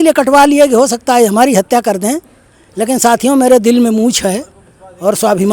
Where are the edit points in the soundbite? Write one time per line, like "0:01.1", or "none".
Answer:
none